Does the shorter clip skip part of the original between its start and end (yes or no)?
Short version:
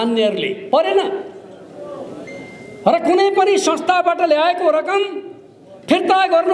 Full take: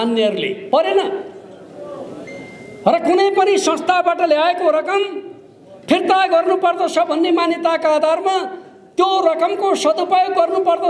no